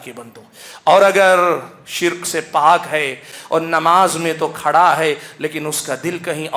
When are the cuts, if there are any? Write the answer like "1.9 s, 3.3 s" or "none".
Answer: 3.3 s